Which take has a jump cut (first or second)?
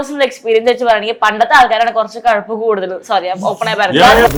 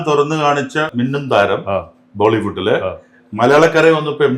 second